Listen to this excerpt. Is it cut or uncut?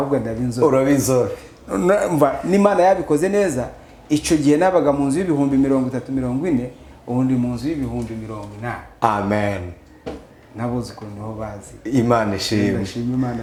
uncut